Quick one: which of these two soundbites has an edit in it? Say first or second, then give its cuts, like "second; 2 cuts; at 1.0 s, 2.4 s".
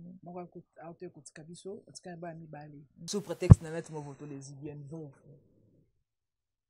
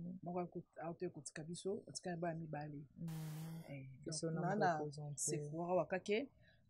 first; 1 cut; at 2.9 s